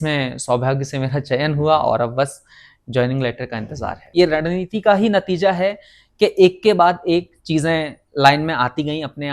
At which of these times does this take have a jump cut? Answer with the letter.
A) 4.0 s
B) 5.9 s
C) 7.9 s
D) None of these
A